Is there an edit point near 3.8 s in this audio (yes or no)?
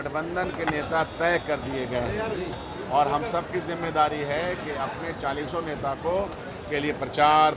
no